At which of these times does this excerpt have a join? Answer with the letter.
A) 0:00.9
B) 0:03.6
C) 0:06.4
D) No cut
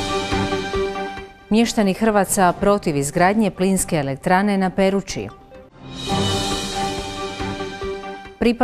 A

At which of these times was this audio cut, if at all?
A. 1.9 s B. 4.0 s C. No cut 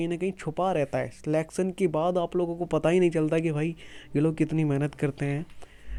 C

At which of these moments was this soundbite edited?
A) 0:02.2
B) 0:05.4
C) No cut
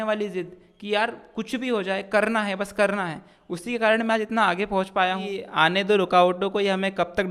B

